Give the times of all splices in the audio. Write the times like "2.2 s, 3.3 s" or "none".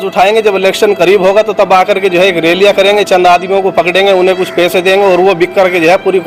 none